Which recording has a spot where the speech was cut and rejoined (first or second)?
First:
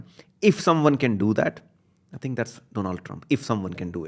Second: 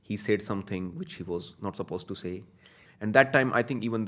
second